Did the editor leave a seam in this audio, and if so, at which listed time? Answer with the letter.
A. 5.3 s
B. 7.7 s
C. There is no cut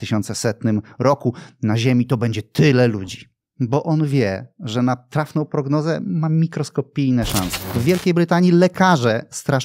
B